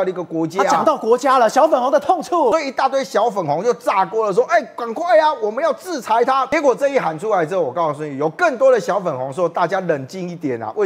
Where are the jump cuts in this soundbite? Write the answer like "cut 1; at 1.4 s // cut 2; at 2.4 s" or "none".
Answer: cut 1; at 2.5 s // cut 2; at 6.5 s